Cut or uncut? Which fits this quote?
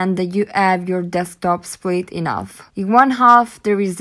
cut